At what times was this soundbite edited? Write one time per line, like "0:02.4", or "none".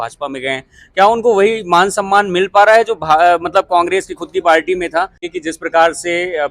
0:05.2